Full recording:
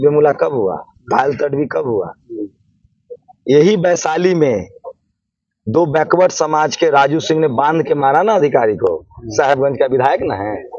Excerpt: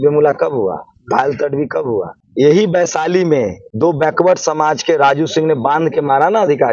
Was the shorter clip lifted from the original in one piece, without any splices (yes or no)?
no